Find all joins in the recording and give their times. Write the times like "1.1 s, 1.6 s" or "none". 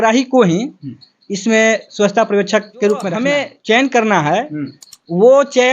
3.1 s